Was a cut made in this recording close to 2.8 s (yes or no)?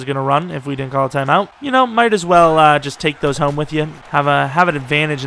no